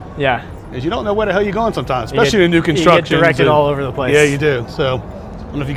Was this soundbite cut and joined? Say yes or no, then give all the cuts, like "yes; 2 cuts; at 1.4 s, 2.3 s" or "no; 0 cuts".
no; 0 cuts